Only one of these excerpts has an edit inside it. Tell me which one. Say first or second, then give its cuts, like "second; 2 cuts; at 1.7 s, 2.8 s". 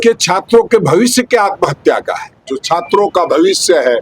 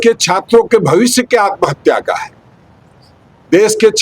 first; 1 cut; at 2.5 s